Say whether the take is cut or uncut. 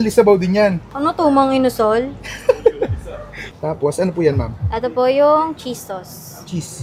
uncut